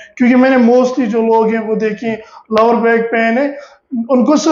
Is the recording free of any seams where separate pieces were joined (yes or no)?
yes